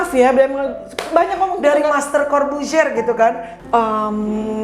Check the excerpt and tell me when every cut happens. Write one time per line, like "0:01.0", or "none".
0:03.5